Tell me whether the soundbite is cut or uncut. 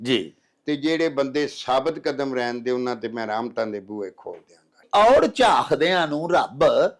cut